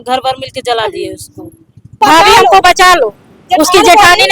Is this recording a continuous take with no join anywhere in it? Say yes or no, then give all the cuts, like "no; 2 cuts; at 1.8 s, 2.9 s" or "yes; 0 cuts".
no; 1 cut; at 2.0 s